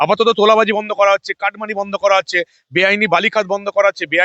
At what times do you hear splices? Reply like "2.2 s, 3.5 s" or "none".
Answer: none

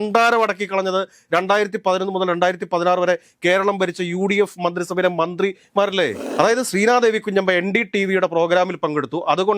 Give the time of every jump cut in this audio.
6.2 s

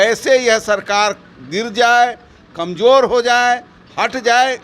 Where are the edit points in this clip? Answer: none

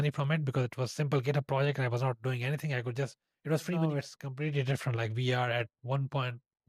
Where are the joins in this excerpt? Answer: 3.8 s

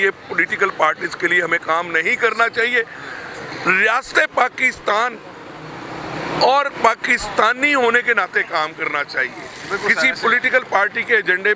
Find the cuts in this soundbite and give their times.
none

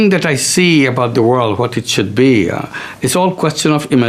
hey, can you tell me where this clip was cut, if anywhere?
none

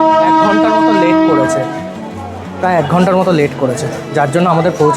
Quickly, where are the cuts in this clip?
none

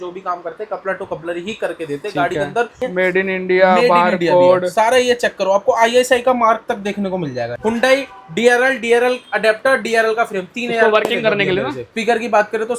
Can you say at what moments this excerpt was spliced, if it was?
2.7 s, 7.5 s, 11.9 s

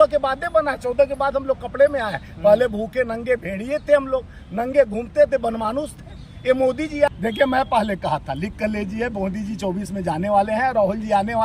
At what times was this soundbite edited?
7.1 s

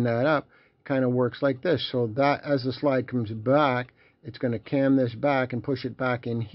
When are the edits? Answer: none

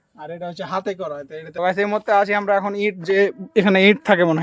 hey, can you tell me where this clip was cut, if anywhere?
1.5 s

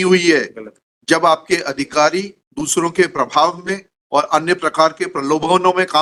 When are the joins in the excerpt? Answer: none

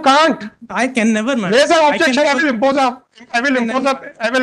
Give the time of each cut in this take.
none

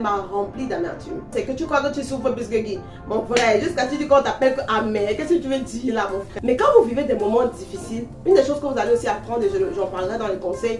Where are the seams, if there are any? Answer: 1.3 s, 6.2 s

